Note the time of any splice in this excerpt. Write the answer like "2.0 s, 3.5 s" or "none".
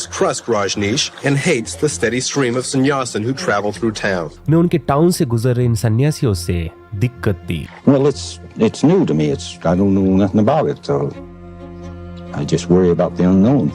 none